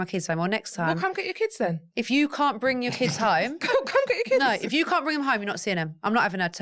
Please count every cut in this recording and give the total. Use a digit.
0